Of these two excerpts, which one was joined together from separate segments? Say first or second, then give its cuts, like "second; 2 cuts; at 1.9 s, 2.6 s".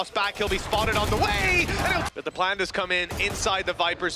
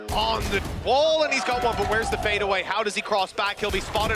first; 1 cut; at 2.1 s